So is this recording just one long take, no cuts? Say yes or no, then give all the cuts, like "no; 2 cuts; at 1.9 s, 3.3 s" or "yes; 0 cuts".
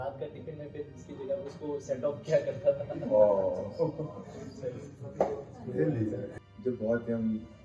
no; 1 cut; at 6.3 s